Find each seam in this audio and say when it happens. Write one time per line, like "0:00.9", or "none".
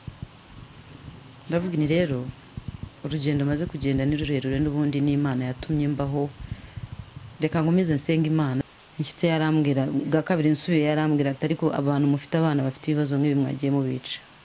0:08.6